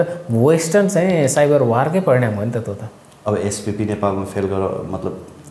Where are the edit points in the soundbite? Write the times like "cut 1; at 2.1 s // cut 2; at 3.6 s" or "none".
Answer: none